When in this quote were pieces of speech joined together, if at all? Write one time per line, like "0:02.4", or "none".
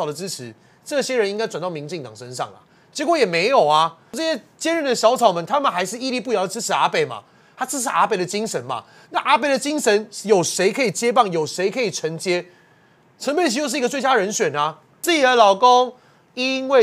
0:04.1
0:15.0